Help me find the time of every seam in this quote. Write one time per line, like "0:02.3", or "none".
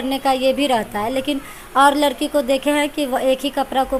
none